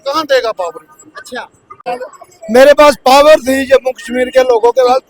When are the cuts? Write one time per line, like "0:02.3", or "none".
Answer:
0:01.9